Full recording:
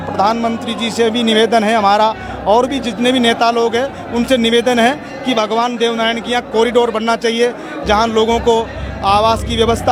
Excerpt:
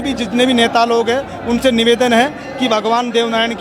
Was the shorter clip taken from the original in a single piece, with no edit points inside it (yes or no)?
yes